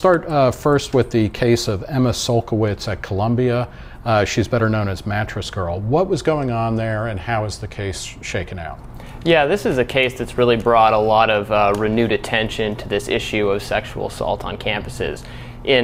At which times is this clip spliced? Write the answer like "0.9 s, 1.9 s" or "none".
none

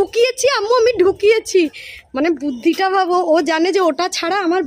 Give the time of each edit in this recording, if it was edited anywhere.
none

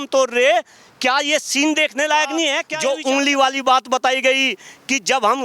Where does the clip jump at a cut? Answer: 2.7 s

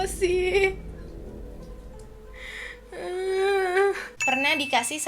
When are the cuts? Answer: 4.1 s

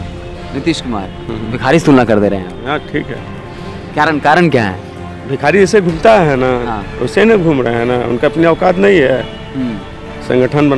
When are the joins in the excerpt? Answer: none

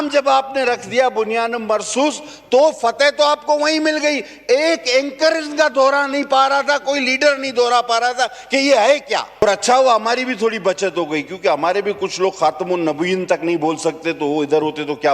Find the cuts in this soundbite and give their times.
9.4 s

